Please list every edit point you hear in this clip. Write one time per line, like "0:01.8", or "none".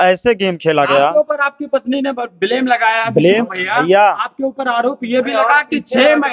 none